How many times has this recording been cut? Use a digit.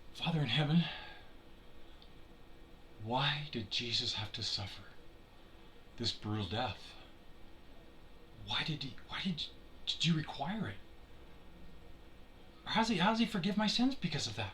1